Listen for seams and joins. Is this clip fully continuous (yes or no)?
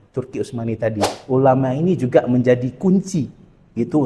no